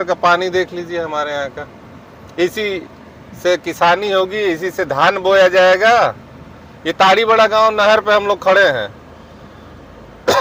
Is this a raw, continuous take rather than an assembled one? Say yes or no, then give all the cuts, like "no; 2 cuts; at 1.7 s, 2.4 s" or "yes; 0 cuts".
yes; 0 cuts